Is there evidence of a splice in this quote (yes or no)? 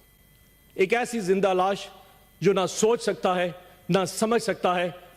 no